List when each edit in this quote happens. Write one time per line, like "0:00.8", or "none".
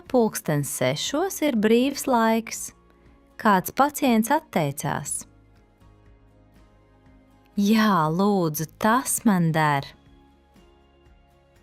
0:05.3
0:07.0